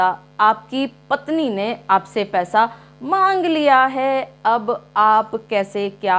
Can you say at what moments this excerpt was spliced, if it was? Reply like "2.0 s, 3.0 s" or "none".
none